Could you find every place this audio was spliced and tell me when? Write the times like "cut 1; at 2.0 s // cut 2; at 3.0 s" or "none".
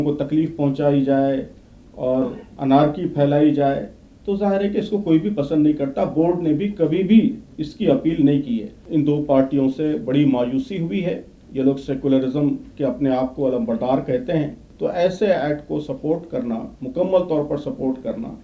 cut 1; at 8.8 s // cut 2; at 14.6 s